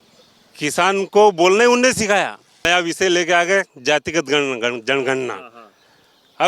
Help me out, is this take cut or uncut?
cut